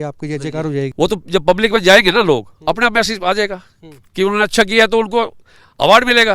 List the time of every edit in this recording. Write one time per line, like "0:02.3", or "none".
0:00.9